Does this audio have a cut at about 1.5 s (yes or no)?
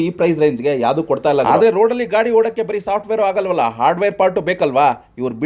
yes